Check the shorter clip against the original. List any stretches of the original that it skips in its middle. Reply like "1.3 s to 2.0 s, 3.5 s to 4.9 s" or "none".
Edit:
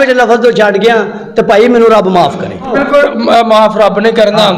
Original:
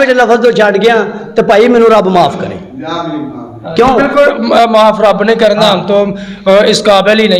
2.7 s to 3.9 s